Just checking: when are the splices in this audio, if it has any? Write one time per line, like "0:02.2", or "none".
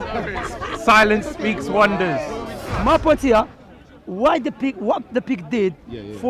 0:02.7